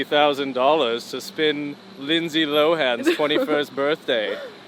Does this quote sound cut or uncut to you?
uncut